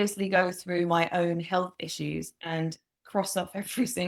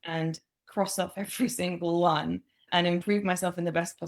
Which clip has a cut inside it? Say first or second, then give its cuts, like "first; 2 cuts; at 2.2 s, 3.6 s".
second; 1 cut; at 2.7 s